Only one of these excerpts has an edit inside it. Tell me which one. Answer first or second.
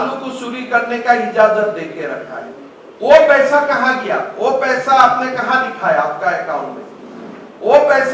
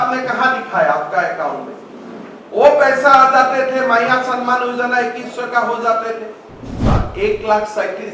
second